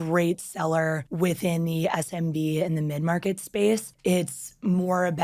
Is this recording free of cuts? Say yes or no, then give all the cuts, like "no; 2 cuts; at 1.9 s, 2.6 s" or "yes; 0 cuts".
no; 2 cuts; at 1.1 s, 3.9 s